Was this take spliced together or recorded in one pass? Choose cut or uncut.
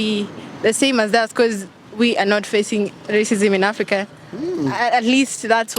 uncut